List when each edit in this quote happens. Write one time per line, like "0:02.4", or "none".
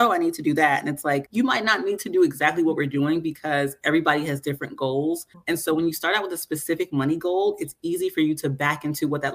0:01.3
0:05.3